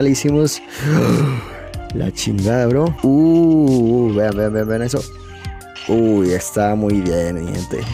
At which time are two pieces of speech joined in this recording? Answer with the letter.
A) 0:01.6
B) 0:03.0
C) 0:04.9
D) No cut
B